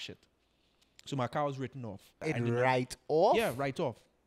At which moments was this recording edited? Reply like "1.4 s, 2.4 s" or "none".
2.1 s